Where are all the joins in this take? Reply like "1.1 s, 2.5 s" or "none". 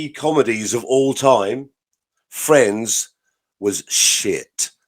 none